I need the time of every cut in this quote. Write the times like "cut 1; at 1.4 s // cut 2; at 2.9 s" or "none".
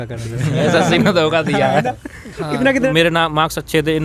cut 1; at 2.9 s

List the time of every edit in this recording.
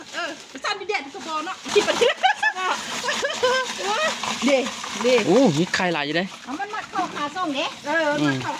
cut 1; at 1.7 s

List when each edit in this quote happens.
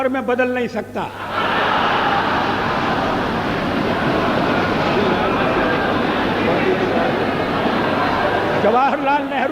none

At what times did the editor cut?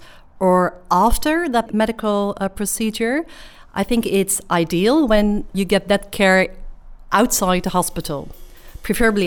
cut 1; at 1.7 s // cut 2; at 5.6 s

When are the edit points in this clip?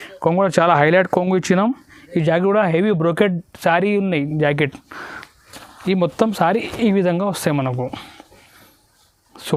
none

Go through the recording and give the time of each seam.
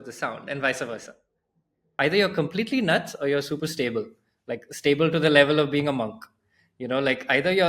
cut 1; at 2.0 s

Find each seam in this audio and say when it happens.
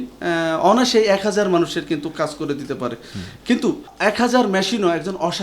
cut 1; at 3.9 s

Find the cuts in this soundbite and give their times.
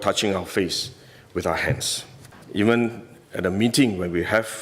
cut 1; at 2.4 s

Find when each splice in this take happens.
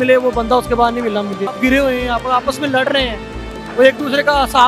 cut 1; at 1.5 s

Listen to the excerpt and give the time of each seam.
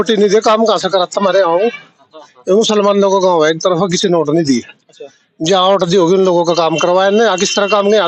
none

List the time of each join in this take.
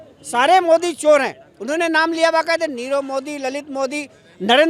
none

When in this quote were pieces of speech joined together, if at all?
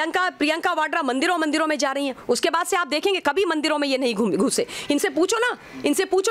none

